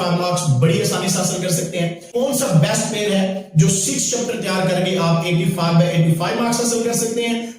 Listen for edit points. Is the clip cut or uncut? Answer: cut